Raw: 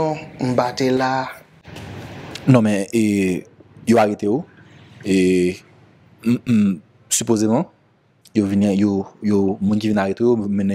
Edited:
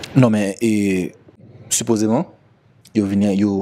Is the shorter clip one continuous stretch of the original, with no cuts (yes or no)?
no